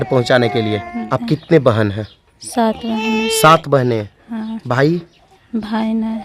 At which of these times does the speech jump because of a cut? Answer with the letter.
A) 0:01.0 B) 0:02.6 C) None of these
A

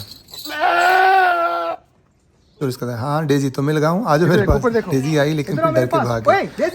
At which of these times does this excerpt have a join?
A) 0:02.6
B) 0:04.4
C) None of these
A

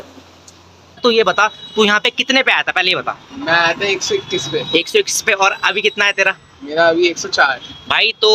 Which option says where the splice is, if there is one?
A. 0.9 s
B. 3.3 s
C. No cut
A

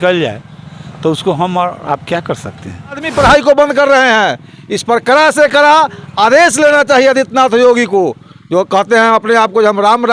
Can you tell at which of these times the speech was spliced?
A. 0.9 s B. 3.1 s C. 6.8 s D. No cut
B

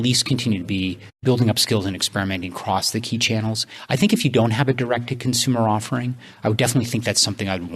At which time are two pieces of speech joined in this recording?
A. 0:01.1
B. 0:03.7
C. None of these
A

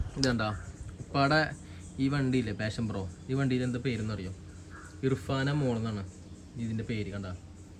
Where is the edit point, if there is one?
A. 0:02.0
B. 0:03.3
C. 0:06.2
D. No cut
D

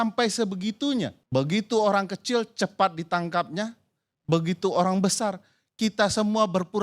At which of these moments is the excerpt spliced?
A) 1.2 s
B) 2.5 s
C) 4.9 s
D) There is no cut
A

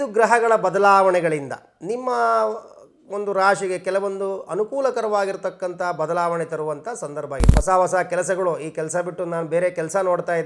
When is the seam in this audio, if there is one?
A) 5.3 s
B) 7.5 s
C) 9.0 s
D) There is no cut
B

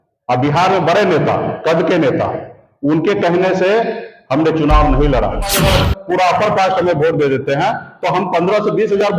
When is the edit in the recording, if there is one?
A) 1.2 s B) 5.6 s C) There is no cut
B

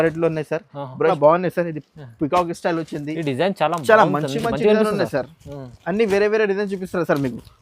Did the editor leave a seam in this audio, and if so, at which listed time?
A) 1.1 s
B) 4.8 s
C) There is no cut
A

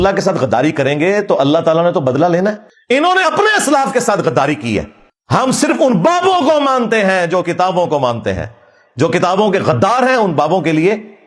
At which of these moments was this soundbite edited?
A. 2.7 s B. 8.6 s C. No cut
A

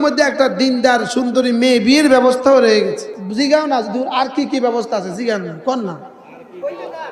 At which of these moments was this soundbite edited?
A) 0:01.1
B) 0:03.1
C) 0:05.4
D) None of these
B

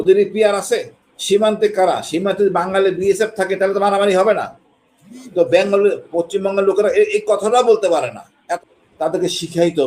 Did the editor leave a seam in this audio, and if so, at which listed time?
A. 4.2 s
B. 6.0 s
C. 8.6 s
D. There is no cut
C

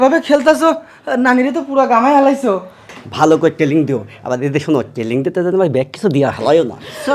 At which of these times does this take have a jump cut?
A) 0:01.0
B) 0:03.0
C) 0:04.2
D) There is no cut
B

